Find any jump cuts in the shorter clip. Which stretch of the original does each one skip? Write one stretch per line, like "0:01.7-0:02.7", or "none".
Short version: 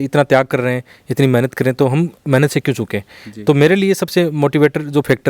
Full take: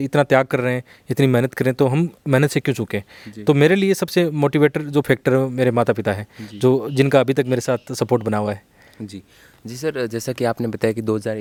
none